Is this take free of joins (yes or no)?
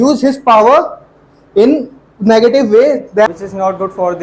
no